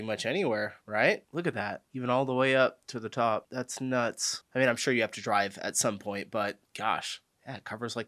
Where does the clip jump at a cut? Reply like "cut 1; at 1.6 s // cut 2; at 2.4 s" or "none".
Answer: none

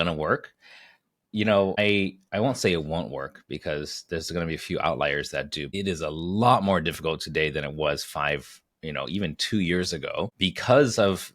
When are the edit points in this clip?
cut 1; at 1.8 s // cut 2; at 5.7 s // cut 3; at 10.3 s

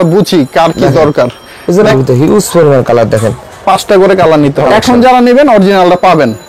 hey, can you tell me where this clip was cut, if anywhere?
cut 1; at 1.9 s // cut 2; at 4.7 s

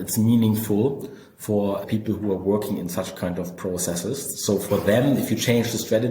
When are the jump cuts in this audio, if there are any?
cut 1; at 1.8 s

